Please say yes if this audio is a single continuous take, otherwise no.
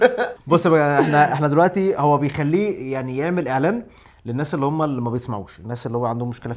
yes